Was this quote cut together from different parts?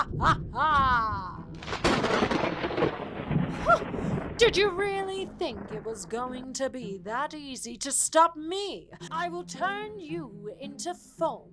no; 0 cuts

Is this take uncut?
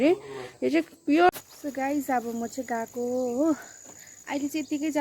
no; 1 cut; at 1.3 s

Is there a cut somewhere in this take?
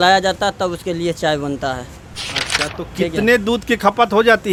no; 0 cuts

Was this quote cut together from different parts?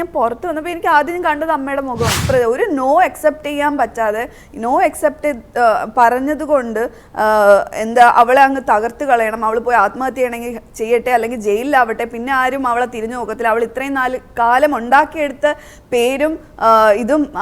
yes; 1 cut; at 2.2 s

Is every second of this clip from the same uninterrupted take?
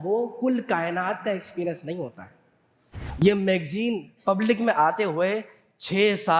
no; 1 cut; at 3.0 s

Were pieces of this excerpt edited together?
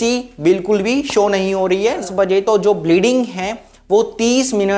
yes; 1 cut; at 2.0 s

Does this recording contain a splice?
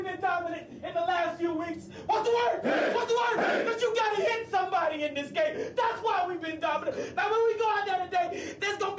no; 0 cuts

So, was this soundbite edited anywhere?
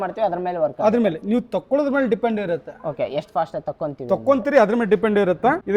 no; 0 cuts

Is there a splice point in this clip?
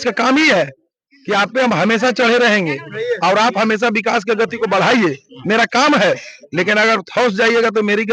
no; 0 cuts

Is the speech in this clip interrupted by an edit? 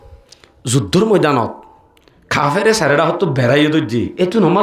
no; 0 cuts

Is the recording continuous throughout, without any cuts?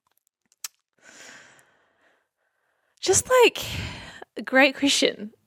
yes; 0 cuts

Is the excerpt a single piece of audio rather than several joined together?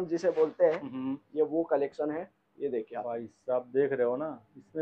yes; 0 cuts

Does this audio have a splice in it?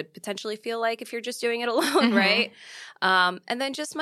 no; 0 cuts

